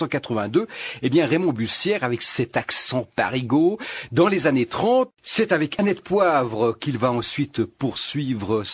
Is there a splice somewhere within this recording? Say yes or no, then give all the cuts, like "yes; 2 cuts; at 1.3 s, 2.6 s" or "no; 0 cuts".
yes; 1 cut; at 5.1 s